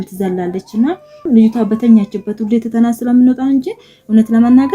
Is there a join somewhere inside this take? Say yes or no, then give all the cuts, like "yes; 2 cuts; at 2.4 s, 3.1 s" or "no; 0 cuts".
yes; 1 cut; at 1.2 s